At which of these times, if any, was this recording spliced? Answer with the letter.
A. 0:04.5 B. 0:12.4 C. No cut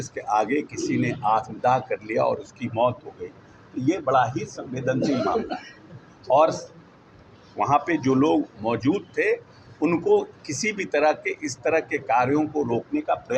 C